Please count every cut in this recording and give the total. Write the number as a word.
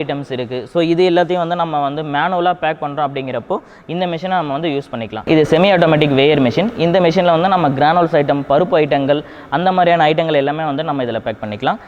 one